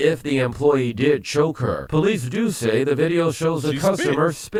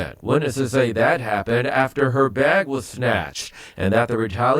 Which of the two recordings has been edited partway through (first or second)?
second